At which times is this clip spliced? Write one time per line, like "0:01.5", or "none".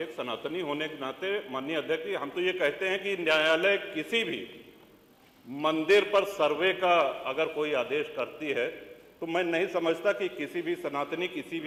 none